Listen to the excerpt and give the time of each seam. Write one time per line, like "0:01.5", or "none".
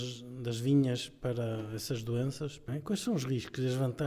0:02.6